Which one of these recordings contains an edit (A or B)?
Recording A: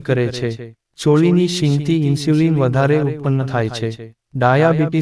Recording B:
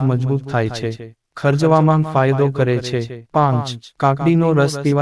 B